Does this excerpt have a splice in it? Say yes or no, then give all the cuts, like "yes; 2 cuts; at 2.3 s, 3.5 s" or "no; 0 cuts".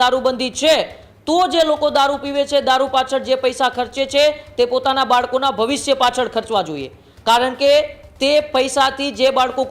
no; 0 cuts